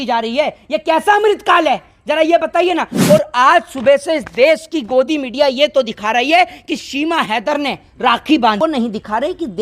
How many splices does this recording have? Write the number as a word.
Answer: one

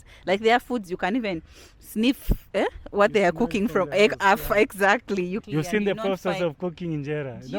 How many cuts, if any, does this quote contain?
one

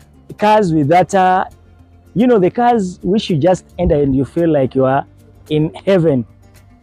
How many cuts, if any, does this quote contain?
zero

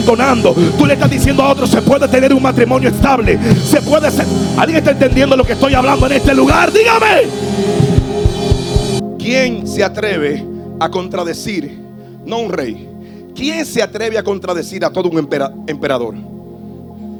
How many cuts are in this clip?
zero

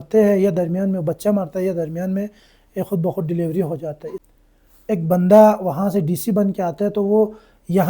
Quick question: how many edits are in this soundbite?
one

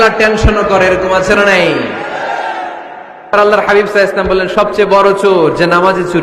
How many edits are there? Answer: one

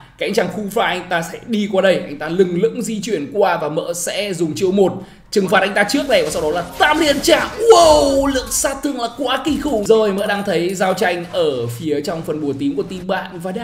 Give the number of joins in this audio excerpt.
one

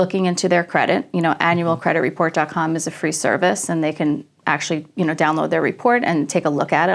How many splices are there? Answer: zero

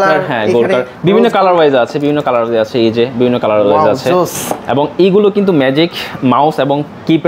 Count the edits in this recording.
zero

